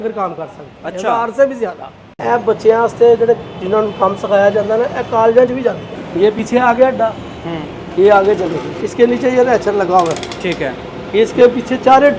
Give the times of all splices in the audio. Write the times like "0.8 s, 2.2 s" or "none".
2.1 s, 6.3 s, 8.8 s